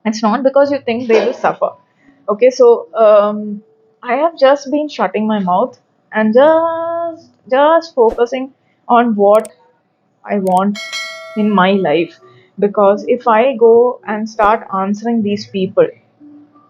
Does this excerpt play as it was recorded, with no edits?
yes; 0 cuts

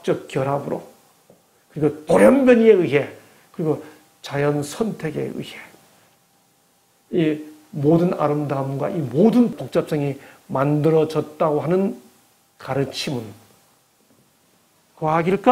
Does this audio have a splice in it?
yes; 1 cut; at 9.6 s

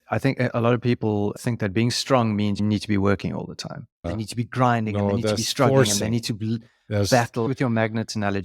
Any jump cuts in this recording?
yes; 3 cuts; at 2.6 s, 4.0 s, 7.5 s

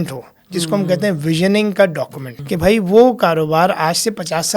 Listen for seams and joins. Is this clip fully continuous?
no; 1 cut; at 2.3 s

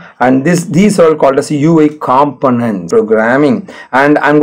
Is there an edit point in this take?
yes; 1 cut; at 2.9 s

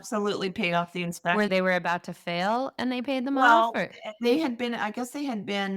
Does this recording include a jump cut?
no; 0 cuts

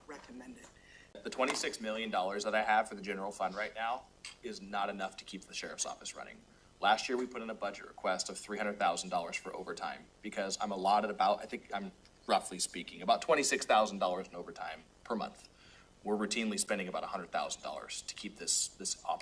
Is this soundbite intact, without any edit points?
no; 1 cut; at 1.2 s

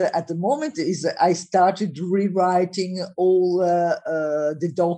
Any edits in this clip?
no; 0 cuts

